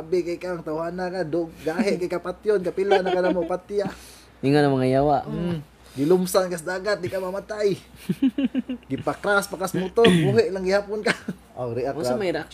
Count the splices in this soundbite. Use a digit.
1